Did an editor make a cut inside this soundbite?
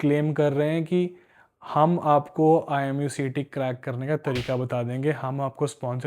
no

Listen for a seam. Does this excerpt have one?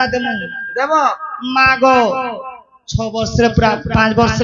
no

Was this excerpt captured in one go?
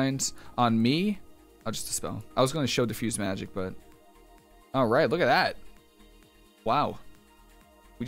yes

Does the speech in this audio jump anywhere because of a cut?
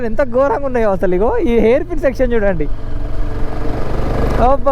no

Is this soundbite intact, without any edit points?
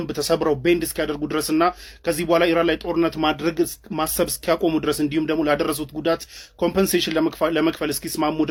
yes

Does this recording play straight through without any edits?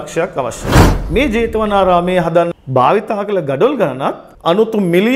no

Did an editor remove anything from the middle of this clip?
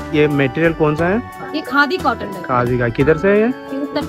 no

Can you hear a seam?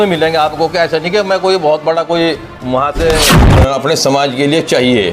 yes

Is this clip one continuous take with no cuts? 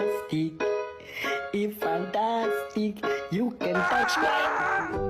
yes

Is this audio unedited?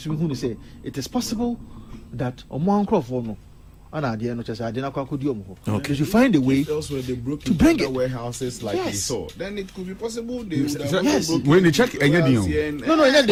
yes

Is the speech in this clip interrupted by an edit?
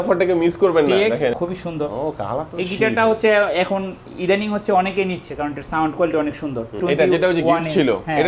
yes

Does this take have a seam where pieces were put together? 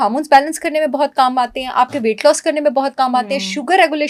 no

